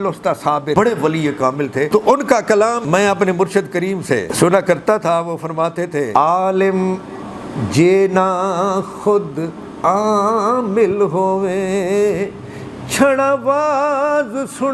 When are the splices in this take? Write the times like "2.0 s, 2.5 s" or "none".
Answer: 0.8 s, 1.9 s, 2.8 s, 4.3 s, 6.1 s